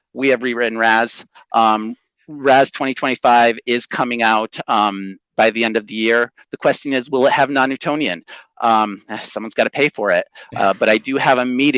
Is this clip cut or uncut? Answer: uncut